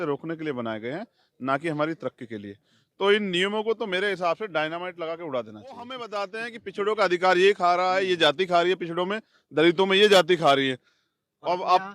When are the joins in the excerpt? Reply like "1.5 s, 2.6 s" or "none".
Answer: 6.1 s